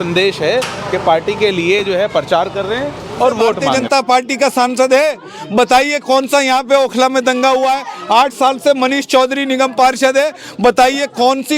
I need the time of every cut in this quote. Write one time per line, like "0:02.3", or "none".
0:03.7